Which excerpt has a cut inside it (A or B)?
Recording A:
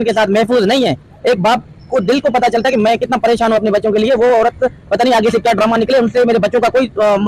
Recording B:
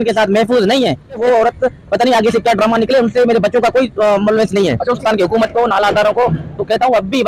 B